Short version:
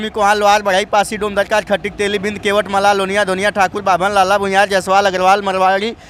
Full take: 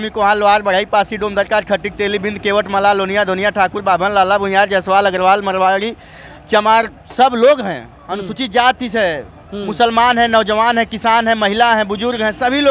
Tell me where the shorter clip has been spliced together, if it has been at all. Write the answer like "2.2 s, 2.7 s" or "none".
none